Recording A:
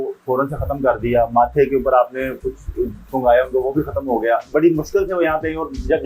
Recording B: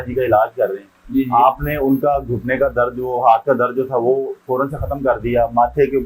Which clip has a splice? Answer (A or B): A